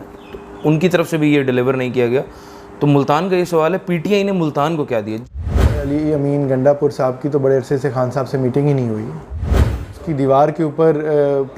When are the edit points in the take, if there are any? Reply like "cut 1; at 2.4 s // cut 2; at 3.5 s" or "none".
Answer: cut 1; at 5.4 s // cut 2; at 9.4 s